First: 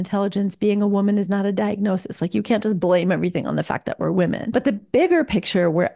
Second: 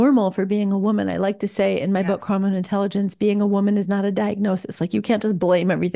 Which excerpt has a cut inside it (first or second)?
first